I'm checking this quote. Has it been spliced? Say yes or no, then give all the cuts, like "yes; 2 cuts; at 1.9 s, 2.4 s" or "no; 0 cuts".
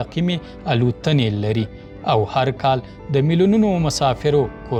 no; 0 cuts